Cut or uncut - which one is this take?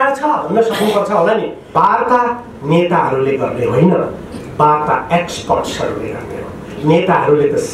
cut